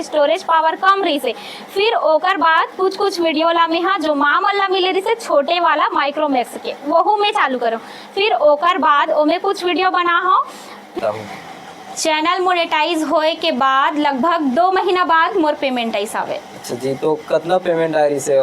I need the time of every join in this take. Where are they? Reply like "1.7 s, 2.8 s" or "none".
11.0 s